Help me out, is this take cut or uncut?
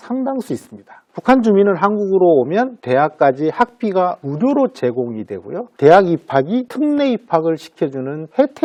uncut